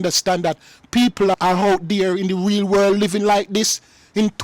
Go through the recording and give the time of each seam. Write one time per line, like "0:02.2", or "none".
none